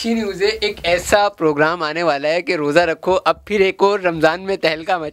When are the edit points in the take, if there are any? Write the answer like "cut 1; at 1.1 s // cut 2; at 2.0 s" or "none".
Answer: none